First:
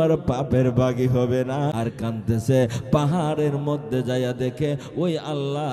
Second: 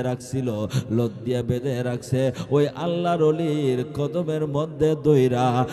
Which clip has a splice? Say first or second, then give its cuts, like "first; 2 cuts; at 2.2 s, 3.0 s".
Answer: first; 1 cut; at 1.7 s